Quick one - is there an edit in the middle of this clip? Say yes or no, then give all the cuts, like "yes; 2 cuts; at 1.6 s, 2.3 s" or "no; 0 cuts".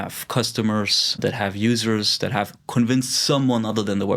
yes; 1 cut; at 1.2 s